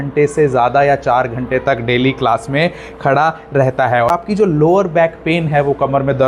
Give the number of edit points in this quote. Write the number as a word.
one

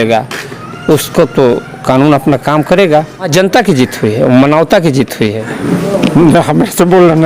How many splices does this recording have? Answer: two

